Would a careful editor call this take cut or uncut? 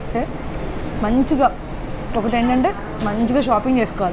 uncut